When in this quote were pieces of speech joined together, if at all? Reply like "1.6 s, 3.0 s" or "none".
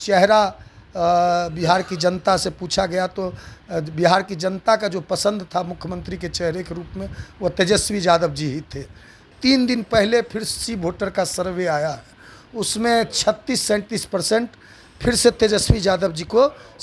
9.3 s